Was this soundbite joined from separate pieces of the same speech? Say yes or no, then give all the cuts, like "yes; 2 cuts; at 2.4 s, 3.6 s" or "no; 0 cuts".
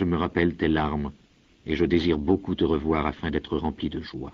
no; 0 cuts